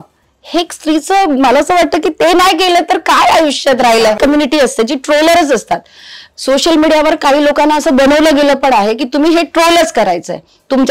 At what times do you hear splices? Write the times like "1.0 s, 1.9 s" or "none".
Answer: 4.2 s